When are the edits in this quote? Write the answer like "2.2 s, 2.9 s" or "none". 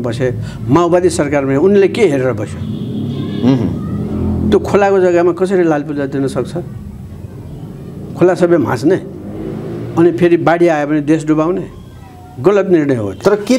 none